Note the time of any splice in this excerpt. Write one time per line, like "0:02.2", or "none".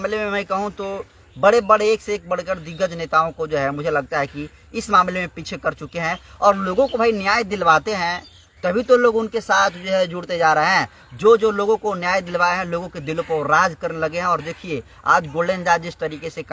none